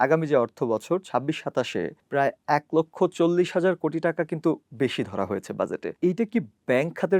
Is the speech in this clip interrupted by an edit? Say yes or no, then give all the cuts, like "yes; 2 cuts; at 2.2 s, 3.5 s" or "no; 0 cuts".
yes; 2 cuts; at 2.0 s, 5.9 s